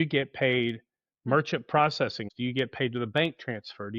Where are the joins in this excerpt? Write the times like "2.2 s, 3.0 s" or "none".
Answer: 2.2 s

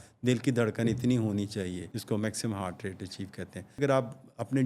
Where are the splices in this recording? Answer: 1.9 s, 3.8 s

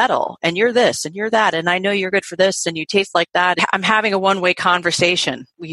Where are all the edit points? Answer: 3.6 s

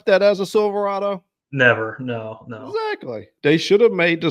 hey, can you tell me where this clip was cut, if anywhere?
3.2 s

